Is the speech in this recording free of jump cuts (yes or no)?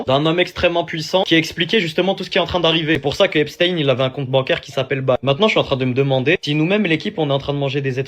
no